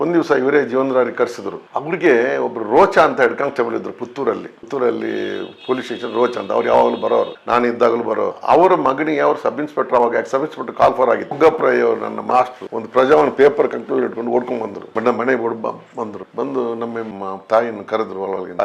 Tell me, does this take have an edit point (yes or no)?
yes